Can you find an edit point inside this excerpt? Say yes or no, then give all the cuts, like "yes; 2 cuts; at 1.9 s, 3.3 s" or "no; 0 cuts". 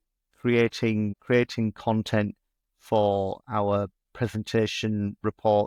no; 0 cuts